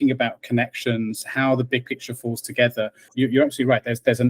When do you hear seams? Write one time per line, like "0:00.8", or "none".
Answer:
0:03.1